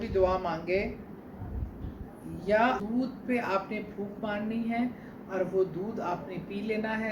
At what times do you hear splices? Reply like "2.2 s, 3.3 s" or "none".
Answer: 2.8 s